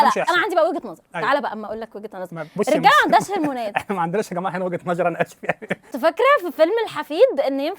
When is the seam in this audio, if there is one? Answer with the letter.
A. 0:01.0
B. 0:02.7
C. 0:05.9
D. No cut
C